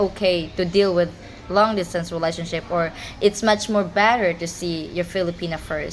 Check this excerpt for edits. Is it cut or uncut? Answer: uncut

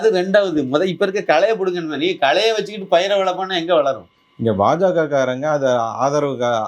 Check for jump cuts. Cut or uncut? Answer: uncut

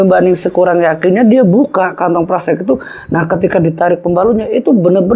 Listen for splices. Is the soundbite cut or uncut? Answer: uncut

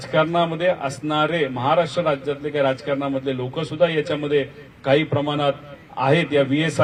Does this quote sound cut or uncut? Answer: uncut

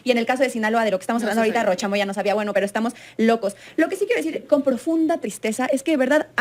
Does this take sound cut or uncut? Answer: uncut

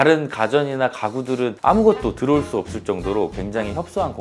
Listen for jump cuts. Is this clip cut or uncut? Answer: uncut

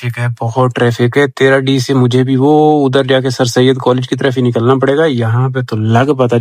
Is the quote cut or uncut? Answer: uncut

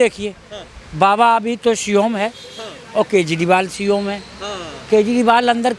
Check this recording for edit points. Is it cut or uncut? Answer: uncut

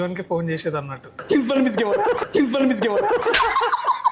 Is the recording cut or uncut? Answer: cut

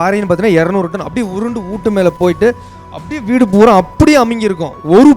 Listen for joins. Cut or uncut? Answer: uncut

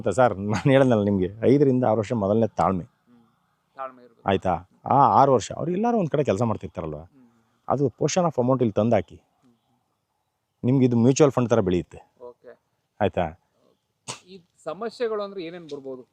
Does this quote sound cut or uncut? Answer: uncut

